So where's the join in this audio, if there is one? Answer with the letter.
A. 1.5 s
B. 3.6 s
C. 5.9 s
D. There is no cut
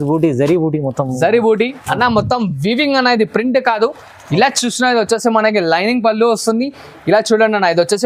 D